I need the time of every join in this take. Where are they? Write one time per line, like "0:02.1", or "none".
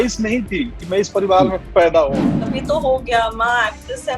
0:02.6